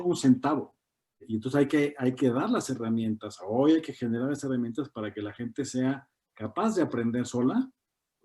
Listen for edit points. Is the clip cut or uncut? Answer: cut